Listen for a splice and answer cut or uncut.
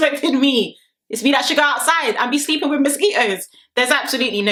uncut